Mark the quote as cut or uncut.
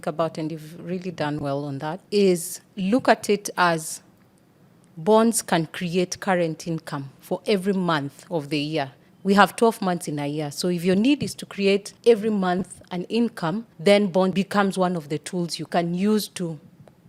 uncut